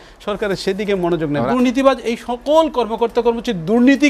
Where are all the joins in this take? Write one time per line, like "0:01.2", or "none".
0:01.4